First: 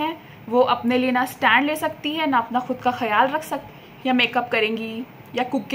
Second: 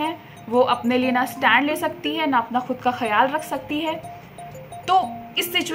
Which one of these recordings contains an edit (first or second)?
first